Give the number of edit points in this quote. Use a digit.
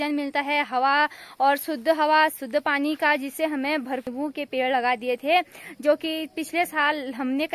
1